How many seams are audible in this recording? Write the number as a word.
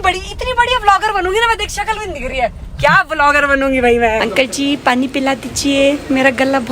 one